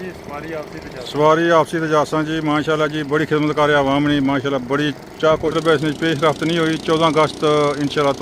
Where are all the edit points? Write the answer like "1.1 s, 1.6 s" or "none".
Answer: 5.5 s